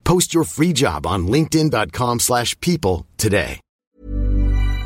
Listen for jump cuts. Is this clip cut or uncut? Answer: cut